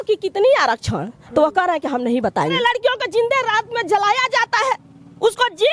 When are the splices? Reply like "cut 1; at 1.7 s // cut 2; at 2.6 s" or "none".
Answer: cut 1; at 2.6 s